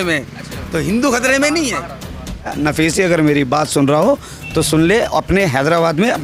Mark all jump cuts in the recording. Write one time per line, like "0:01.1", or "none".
0:02.5